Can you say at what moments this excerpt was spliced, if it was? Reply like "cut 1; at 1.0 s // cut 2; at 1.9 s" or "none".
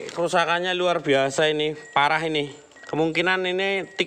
none